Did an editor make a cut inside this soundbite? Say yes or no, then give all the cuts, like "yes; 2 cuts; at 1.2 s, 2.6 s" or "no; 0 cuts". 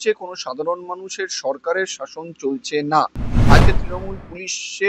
yes; 1 cut; at 3.7 s